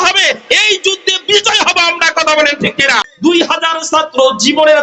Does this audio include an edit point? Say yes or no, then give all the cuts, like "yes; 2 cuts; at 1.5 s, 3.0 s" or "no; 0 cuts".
yes; 1 cut; at 3.0 s